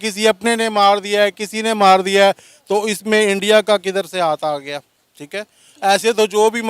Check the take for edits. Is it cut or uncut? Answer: uncut